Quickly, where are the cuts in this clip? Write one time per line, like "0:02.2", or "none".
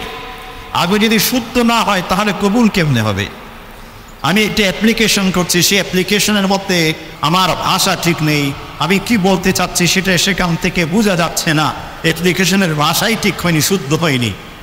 0:07.1